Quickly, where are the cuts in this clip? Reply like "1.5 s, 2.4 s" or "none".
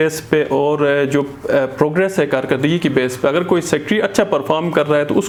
none